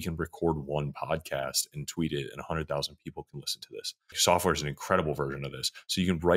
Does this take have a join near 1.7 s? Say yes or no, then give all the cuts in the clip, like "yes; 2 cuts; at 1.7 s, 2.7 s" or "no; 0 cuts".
no; 1 cut; at 4.2 s